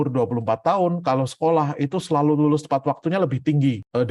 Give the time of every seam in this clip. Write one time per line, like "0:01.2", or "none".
none